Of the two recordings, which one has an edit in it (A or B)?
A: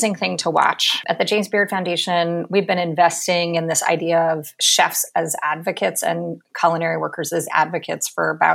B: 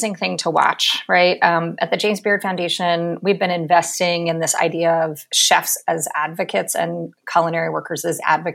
A